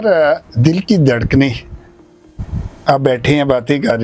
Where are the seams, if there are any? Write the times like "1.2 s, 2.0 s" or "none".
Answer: none